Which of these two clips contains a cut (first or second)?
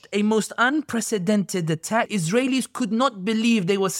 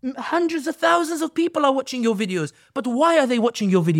first